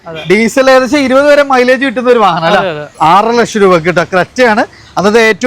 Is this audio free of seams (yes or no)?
no